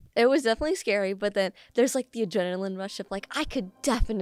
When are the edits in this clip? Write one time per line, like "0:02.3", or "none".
none